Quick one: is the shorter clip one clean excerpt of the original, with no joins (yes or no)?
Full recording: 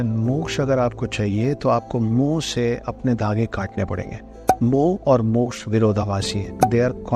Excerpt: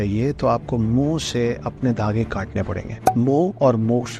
no